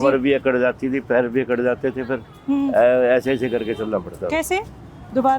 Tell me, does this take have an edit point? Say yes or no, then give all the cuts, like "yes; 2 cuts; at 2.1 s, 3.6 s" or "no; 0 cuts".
no; 0 cuts